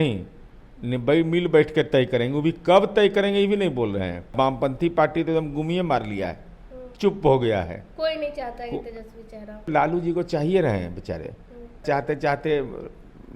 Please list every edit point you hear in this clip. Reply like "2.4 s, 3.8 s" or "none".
4.3 s, 9.7 s, 11.8 s